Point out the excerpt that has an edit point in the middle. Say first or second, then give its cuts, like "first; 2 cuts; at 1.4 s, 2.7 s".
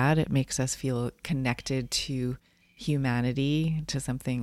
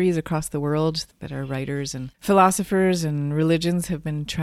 second; 1 cut; at 2.1 s